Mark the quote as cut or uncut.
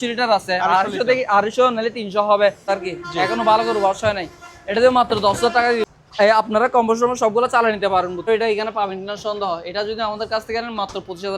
cut